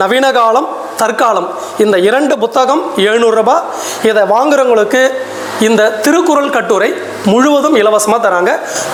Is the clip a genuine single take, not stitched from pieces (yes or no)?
yes